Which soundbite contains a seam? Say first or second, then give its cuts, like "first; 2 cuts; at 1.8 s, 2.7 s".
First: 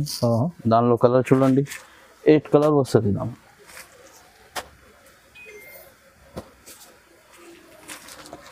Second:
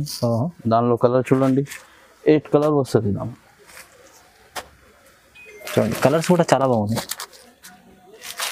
second; 1 cut; at 5.7 s